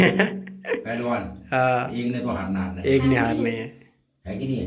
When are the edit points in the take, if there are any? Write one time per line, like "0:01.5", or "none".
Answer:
none